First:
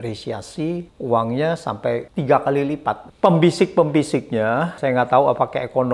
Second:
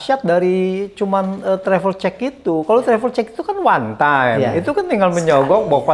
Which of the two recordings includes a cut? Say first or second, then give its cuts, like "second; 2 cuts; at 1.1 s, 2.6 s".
first; 4 cuts; at 0.9 s, 2.1 s, 3.1 s, 4.8 s